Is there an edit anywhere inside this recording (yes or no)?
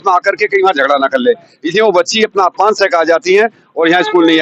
no